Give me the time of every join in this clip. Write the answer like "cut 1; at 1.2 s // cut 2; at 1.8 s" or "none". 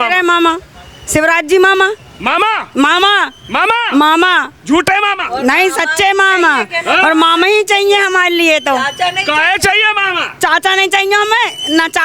none